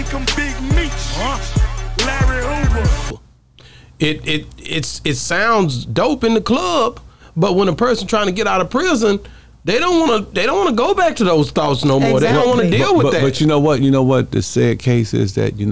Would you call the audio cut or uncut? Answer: uncut